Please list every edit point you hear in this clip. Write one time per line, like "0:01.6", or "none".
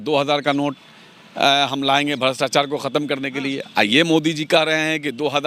none